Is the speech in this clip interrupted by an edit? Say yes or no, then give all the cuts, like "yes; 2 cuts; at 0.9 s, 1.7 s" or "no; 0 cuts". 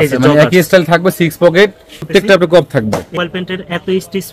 yes; 2 cuts; at 2.1 s, 3.2 s